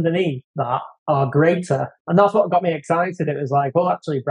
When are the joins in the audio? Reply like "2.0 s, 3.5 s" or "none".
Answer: 0.9 s, 2.0 s